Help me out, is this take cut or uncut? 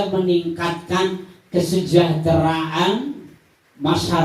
uncut